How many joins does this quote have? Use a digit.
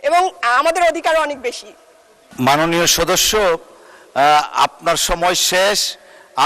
1